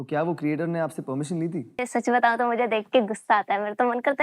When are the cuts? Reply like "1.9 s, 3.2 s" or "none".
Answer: 1.7 s